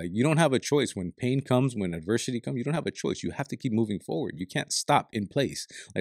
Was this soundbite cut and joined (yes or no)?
no